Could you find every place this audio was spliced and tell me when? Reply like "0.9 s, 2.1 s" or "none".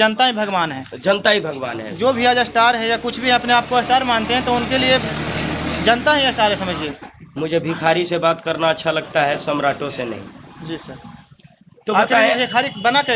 7.0 s

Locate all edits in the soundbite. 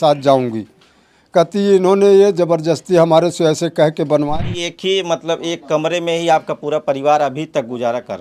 4.3 s

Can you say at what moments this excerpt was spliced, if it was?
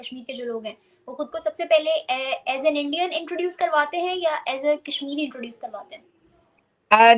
none

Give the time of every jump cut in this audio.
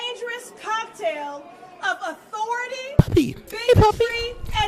2.9 s

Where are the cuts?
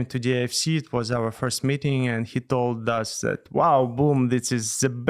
none

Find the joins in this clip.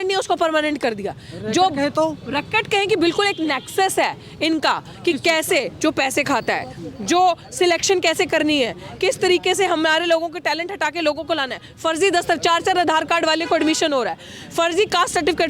none

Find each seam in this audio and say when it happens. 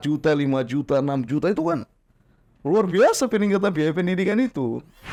none

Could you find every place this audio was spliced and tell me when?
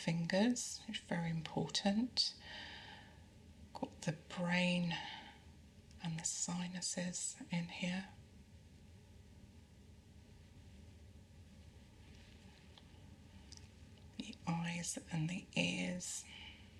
none

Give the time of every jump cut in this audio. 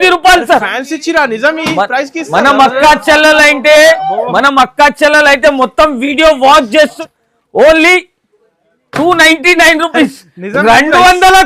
7.0 s

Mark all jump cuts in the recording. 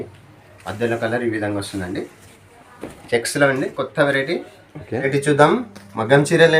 5.0 s

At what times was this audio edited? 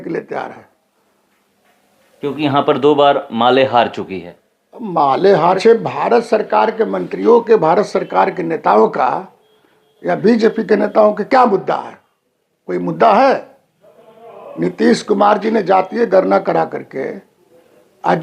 5.6 s

